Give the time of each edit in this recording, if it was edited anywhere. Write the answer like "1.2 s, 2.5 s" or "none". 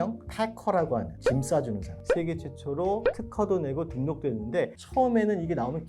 2.0 s